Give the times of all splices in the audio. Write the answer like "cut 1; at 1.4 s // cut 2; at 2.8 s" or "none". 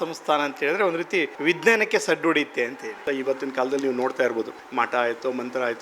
cut 1; at 1.3 s // cut 2; at 3.0 s // cut 3; at 4.6 s